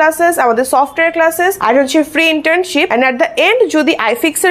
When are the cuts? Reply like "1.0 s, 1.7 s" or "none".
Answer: 1.6 s, 2.9 s